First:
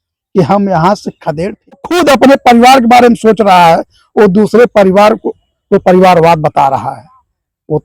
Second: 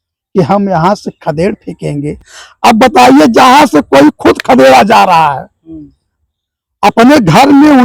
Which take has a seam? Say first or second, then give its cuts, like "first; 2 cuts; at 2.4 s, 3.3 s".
first; 1 cut; at 1.9 s